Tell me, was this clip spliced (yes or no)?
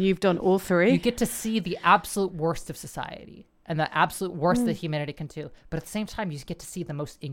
no